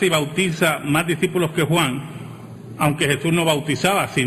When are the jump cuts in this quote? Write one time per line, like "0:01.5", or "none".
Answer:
none